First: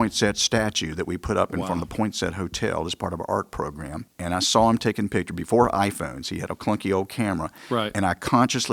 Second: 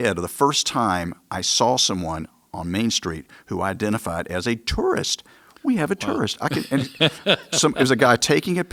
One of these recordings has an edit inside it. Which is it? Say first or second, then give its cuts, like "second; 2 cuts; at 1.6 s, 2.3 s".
first; 1 cut; at 4.1 s